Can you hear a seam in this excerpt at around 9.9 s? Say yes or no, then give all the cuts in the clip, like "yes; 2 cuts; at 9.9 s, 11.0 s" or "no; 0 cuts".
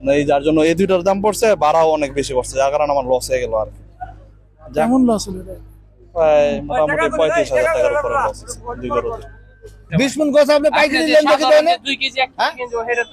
yes; 1 cut; at 9.9 s